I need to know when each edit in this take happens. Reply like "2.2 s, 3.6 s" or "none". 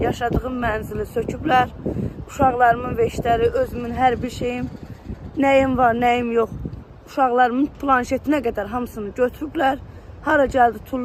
none